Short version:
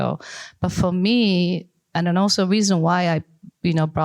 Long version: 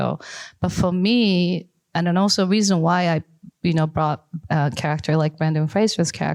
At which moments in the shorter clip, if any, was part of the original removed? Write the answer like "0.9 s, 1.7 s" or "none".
none

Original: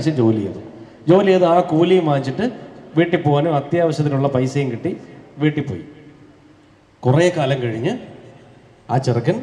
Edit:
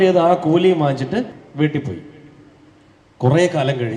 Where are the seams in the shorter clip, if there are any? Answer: 1.4 s

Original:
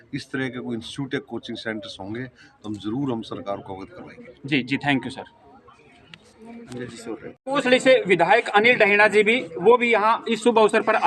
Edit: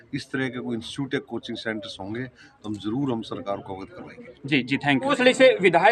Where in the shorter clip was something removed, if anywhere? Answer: 5.0 s

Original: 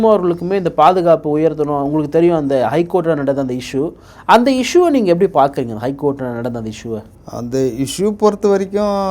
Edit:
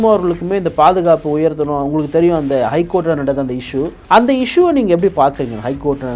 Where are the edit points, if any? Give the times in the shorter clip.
4.0 s

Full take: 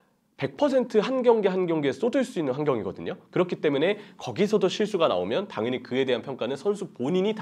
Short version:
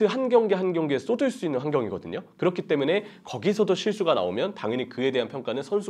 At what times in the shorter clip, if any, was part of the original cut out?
none

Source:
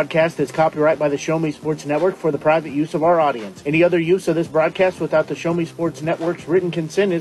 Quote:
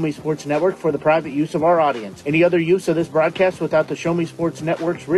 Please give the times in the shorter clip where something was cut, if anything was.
none

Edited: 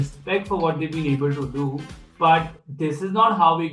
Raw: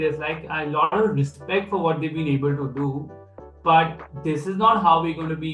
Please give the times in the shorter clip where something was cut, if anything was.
2.0 s

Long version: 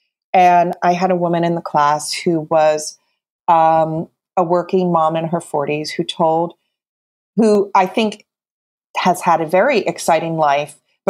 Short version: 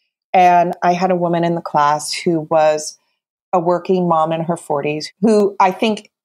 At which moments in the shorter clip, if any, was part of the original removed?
3.2 s, 5.1 s

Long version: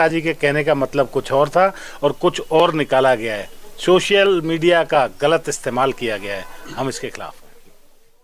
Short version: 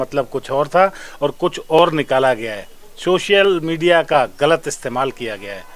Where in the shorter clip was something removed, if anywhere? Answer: none

